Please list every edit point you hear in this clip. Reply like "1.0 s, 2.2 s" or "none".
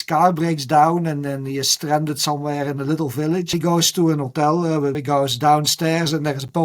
3.5 s, 5.0 s